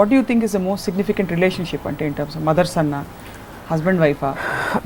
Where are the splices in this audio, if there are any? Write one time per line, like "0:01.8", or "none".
none